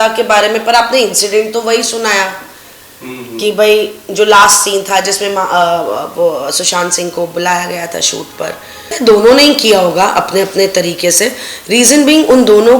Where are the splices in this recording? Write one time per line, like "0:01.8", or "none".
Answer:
0:08.9